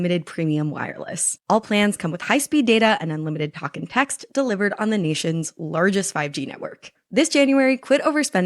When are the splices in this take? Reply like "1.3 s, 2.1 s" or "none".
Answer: 1.3 s